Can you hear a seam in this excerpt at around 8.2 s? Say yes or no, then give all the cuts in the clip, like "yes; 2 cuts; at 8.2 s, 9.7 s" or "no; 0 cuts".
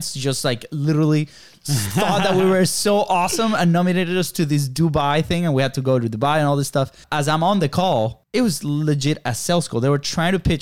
yes; 2 cuts; at 7.0 s, 8.2 s